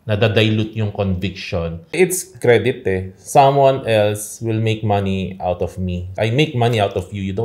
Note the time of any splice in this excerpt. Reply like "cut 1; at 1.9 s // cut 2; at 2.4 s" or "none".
cut 1; at 1.9 s // cut 2; at 6.1 s